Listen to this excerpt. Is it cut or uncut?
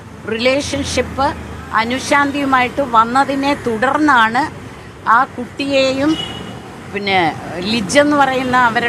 uncut